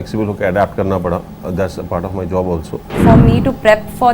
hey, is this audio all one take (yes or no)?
no